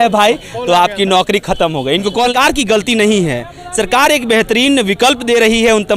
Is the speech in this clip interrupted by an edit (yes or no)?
yes